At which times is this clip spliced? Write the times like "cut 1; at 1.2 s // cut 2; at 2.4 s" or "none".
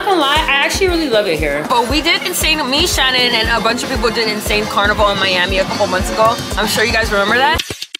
cut 1; at 1.7 s